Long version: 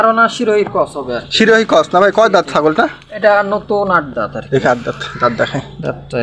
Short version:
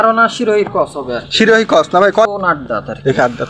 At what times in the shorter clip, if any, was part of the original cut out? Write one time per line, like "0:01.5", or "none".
0:02.3

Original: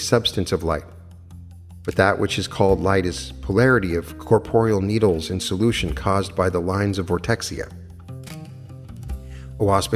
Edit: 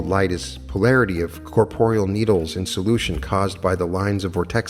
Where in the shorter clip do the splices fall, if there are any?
none

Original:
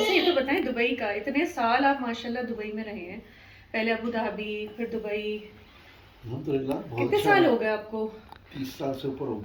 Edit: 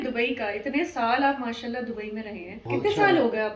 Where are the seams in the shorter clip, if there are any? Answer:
0:02.6

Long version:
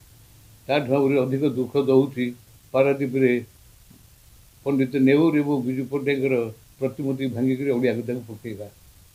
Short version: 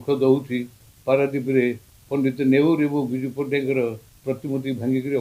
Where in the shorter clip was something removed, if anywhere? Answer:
0:01.9

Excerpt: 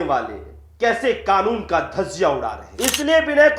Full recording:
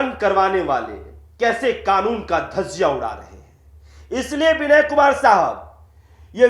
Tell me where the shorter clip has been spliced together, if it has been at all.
0:02.6

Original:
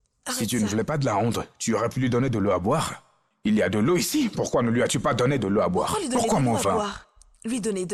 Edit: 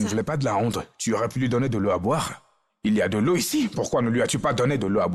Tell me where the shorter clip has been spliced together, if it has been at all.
none

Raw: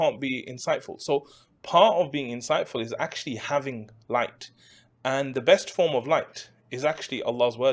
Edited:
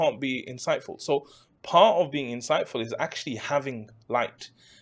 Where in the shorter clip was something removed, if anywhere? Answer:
none

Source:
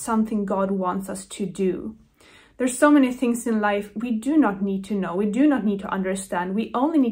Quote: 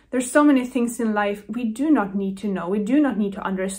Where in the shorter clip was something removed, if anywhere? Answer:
none

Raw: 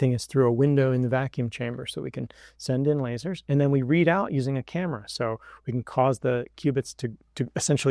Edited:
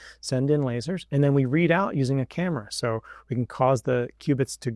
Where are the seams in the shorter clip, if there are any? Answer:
none

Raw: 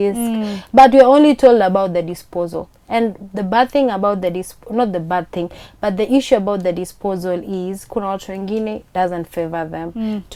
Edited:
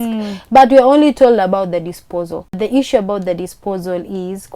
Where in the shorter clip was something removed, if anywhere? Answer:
0:02.5

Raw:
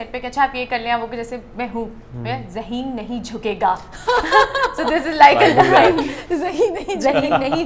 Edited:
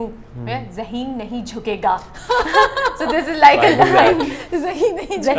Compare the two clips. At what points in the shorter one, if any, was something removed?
none

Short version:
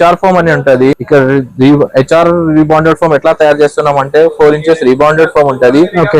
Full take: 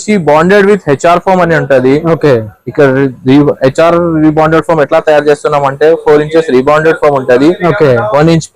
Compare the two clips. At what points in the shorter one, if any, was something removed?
0:01.0

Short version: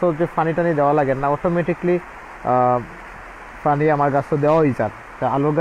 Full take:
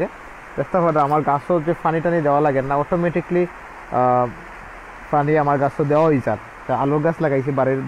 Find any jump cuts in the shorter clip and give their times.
none

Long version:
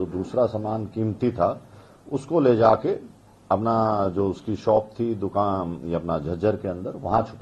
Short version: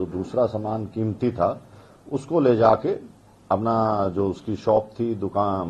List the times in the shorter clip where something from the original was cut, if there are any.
none

